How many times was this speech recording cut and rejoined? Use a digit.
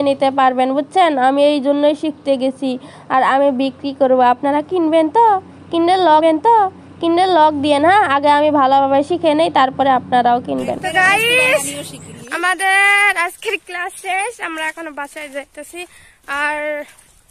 0